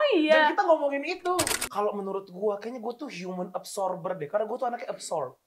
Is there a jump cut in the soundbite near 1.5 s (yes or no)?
yes